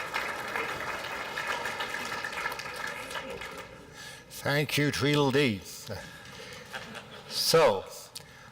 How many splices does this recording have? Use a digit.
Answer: 1